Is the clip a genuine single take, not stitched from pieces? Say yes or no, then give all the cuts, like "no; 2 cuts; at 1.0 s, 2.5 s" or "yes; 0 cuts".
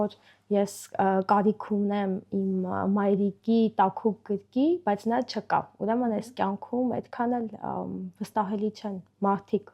yes; 0 cuts